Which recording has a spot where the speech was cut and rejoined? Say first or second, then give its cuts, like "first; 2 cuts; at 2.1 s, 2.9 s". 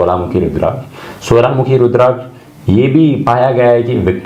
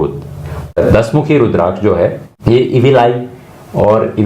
second; 2 cuts; at 0.8 s, 2.3 s